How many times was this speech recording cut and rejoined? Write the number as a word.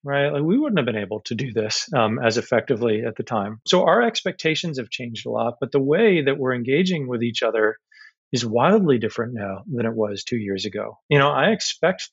two